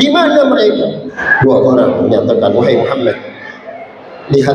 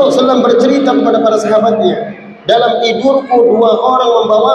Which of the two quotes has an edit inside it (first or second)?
first